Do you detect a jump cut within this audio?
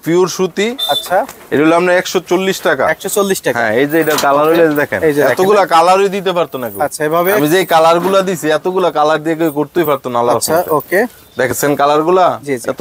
no; 0 cuts

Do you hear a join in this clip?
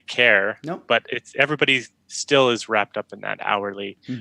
no; 0 cuts

